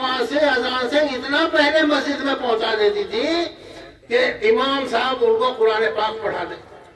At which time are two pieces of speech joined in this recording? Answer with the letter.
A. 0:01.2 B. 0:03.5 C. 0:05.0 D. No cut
D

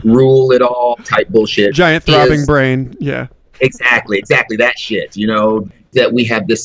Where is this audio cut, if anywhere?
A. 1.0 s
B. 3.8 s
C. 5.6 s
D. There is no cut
C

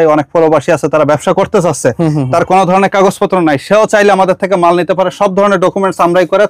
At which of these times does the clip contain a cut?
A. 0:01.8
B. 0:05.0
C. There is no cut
C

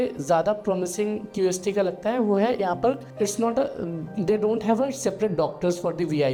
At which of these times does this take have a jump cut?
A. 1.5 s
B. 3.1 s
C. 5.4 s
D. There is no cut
D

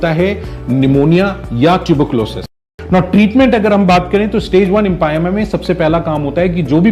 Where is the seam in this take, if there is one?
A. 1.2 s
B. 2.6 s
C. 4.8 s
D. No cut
B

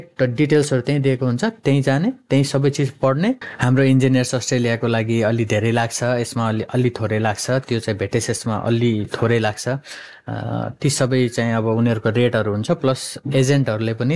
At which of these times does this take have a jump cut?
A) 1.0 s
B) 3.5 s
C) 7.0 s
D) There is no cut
B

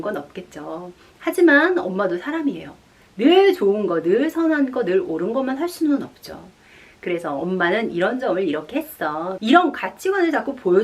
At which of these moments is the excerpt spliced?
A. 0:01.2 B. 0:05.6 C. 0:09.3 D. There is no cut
C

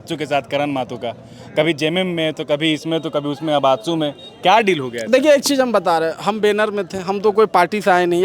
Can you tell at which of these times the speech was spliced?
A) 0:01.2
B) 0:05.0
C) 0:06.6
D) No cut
D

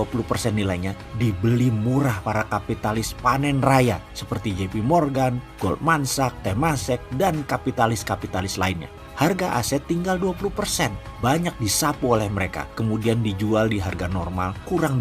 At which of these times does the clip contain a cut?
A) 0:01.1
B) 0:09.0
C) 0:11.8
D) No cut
B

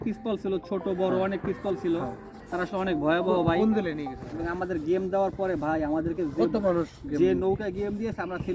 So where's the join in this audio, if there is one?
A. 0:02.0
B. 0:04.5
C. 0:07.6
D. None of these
B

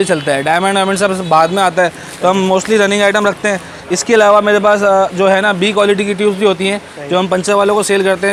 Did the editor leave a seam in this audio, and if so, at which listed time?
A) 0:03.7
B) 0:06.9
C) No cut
C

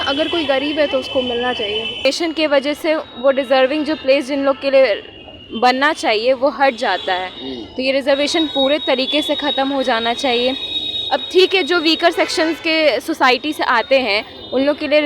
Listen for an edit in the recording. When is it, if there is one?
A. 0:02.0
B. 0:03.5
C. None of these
A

